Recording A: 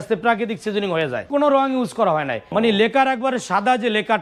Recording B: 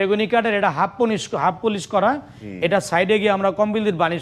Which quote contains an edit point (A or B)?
A